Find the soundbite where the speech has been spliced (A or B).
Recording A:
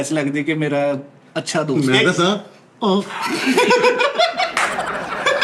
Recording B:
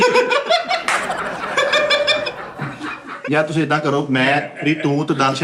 B